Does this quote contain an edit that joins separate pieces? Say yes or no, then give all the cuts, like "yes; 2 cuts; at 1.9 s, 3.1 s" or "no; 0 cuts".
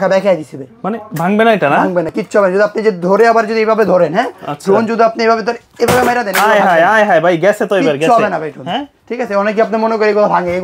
no; 0 cuts